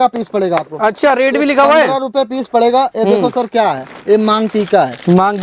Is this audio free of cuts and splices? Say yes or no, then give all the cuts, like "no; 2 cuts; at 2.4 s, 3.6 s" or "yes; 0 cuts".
yes; 0 cuts